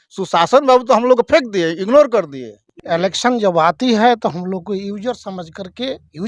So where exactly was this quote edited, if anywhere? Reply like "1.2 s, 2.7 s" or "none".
2.7 s